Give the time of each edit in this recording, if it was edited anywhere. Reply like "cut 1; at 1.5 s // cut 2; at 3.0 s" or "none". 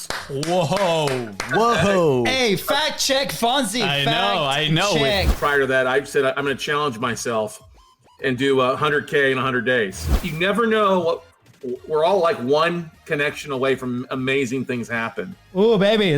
cut 1; at 5.3 s // cut 2; at 10.2 s